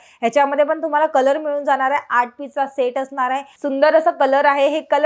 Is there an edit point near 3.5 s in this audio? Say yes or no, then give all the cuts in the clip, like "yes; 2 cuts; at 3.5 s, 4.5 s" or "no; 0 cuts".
yes; 1 cut; at 3.5 s